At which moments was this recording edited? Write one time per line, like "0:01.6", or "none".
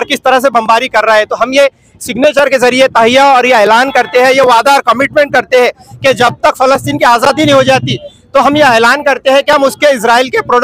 none